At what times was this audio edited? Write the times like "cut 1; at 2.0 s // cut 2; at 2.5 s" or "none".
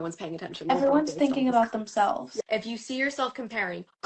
cut 1; at 0.7 s // cut 2; at 2.3 s